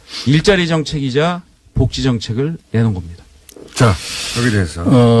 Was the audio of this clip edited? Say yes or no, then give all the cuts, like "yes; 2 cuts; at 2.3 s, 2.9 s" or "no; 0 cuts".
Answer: no; 0 cuts